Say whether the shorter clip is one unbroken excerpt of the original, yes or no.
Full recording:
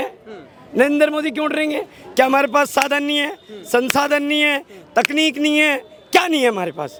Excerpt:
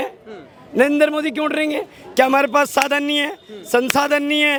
yes